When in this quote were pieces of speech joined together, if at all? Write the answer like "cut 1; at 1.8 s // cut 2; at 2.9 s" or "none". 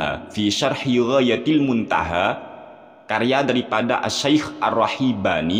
none